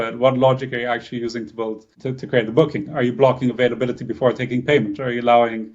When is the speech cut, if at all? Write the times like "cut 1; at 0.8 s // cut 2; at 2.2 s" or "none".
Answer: cut 1; at 1.9 s